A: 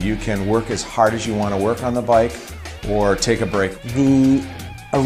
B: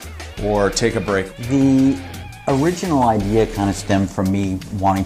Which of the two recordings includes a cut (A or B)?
A